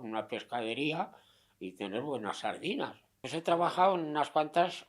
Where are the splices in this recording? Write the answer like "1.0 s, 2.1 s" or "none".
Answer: 3.2 s